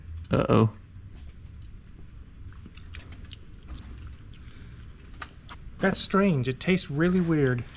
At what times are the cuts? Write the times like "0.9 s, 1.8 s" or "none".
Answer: 5.5 s